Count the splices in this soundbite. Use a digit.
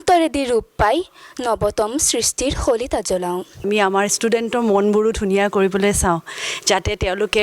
1